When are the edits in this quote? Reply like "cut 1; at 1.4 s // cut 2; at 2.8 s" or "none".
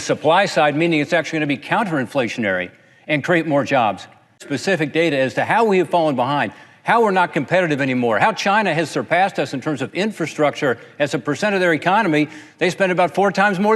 cut 1; at 4.5 s